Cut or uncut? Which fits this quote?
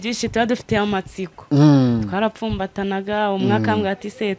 uncut